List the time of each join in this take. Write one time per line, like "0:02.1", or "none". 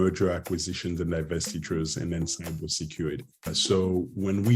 0:03.5

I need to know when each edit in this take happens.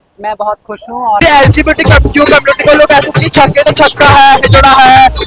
0:01.2

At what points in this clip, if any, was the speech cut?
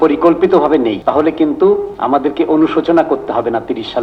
0:01.0
0:01.9

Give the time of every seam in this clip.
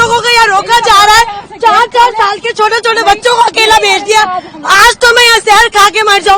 none

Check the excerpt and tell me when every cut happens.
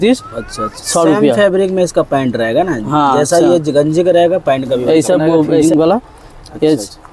0:05.6

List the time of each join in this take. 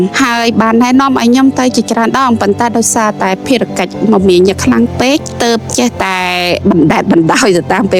none

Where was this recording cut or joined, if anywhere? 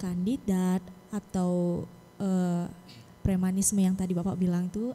none

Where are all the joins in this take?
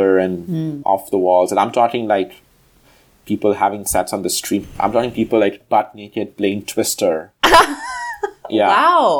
0:04.8

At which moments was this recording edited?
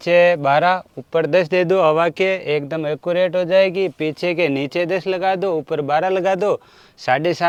none

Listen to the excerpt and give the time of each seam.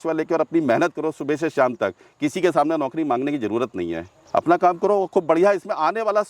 0:04.1

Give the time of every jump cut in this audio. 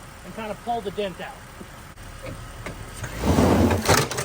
0:01.7

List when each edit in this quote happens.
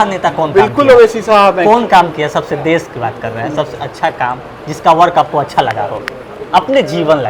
none

